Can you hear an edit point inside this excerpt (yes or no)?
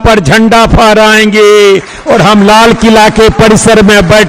no